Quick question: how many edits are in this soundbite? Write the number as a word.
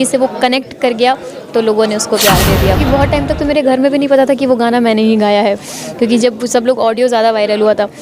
one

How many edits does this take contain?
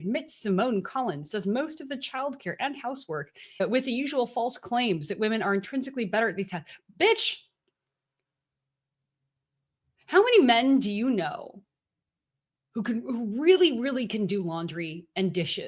zero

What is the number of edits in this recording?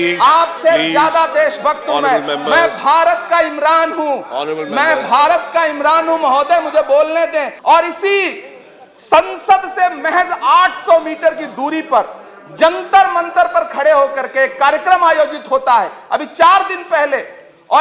one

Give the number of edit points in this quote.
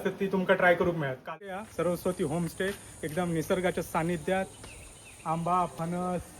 one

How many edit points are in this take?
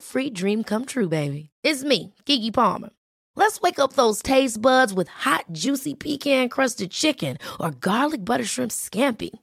zero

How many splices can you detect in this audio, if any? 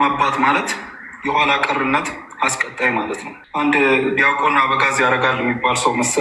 one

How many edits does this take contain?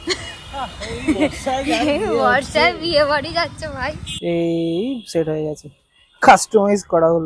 one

